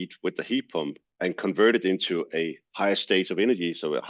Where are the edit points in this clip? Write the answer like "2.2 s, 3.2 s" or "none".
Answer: 1.0 s